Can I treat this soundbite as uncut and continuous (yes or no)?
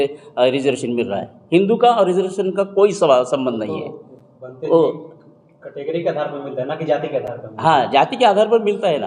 yes